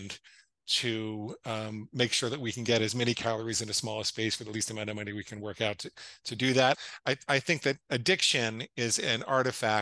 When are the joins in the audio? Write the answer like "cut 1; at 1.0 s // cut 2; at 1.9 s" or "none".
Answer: cut 1; at 6.8 s